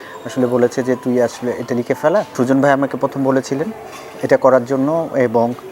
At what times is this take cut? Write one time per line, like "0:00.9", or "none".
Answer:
0:02.3